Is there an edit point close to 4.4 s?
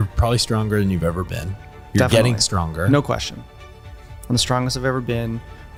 no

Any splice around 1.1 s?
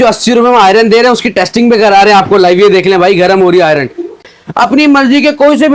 no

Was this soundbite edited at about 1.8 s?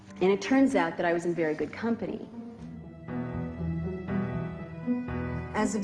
yes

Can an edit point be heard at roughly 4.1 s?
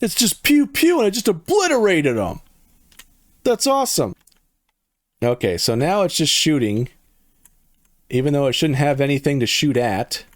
yes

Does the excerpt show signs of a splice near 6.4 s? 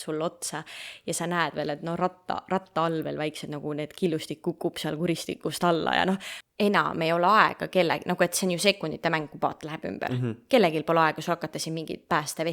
yes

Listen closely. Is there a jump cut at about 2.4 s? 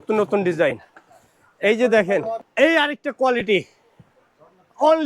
yes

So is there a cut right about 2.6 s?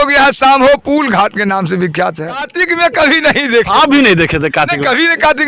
yes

